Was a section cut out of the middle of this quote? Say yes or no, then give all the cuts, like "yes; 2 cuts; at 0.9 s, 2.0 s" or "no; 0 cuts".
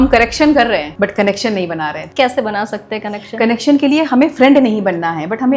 yes; 2 cuts; at 0.9 s, 2.0 s